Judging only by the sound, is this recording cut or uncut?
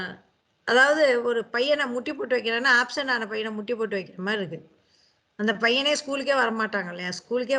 uncut